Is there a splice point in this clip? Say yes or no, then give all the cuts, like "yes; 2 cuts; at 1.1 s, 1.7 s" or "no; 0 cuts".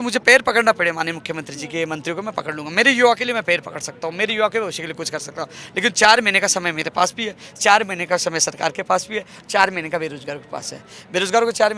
no; 0 cuts